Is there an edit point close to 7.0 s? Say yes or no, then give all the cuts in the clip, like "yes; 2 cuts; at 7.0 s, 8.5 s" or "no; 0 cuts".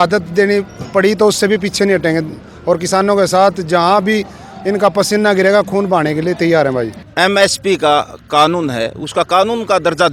yes; 1 cut; at 7.0 s